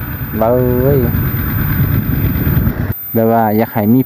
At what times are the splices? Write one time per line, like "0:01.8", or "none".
0:02.9